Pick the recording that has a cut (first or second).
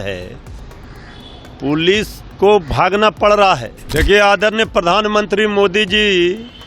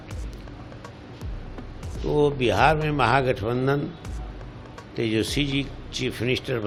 first